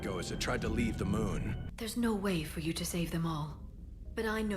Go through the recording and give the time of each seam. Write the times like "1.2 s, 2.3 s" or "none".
1.6 s